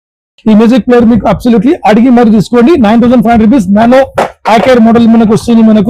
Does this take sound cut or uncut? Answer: uncut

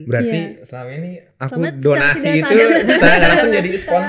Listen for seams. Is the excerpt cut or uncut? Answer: uncut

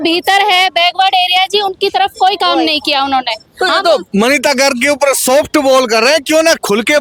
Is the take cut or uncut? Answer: uncut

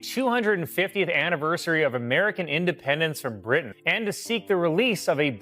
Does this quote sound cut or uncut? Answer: cut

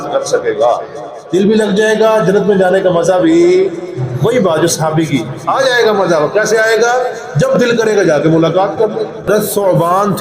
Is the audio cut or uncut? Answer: cut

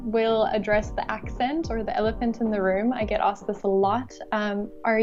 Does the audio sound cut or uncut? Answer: uncut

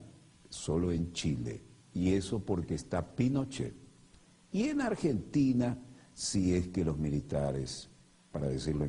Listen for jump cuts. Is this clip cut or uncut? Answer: uncut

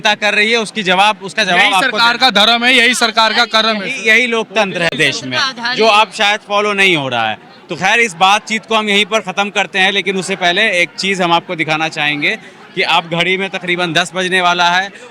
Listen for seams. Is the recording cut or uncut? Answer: uncut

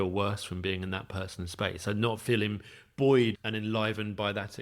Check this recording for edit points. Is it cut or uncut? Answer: cut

